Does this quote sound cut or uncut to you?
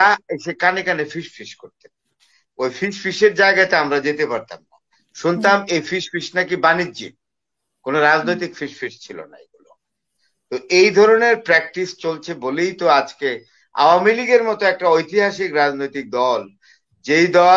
uncut